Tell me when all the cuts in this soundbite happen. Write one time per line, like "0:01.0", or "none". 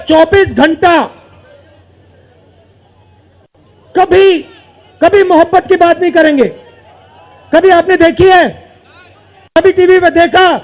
none